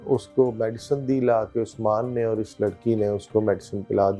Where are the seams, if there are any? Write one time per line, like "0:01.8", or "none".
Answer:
none